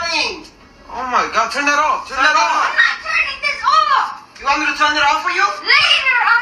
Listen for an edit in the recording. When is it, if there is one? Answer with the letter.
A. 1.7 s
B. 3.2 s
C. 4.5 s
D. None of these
C